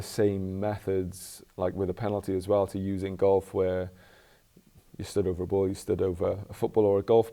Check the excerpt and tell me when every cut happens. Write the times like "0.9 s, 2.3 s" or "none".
none